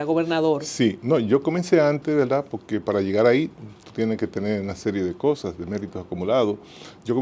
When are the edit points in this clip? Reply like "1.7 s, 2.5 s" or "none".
none